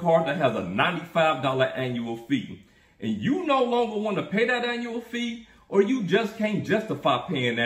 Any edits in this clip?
no; 0 cuts

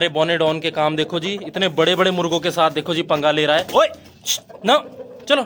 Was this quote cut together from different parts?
no; 0 cuts

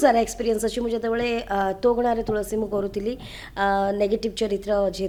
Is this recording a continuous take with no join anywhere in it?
yes; 0 cuts

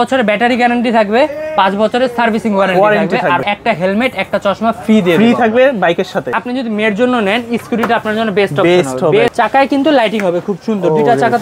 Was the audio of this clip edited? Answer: yes; 3 cuts; at 3.4 s, 6.4 s, 9.3 s

